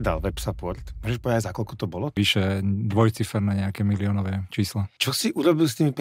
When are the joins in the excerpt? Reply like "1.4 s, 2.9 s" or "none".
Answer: 0.9 s, 2.2 s, 4.9 s